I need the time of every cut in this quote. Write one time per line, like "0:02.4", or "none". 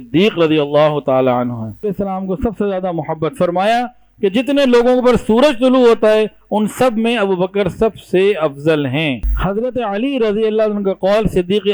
0:01.8
0:09.3